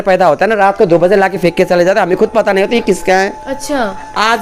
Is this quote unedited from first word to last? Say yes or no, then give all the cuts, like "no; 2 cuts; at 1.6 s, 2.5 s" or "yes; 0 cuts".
yes; 0 cuts